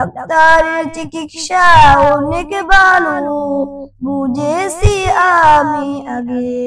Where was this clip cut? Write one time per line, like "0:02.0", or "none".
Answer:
none